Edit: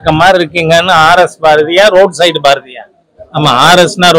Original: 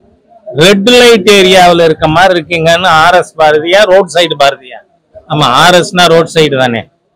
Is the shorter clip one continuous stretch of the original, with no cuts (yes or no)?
yes